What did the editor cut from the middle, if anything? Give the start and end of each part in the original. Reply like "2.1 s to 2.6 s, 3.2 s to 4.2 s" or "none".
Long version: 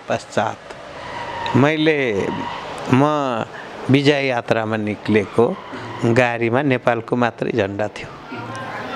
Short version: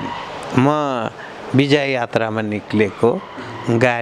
none